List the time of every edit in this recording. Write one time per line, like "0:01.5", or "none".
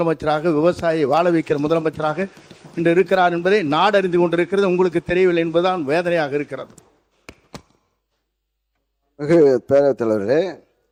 none